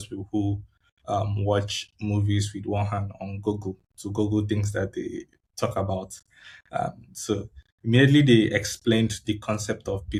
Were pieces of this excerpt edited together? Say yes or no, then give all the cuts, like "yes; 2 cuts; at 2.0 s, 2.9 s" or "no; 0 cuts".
no; 0 cuts